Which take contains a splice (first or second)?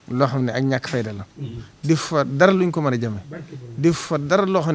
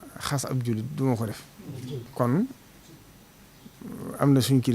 second